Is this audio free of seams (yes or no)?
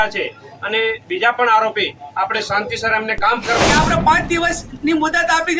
no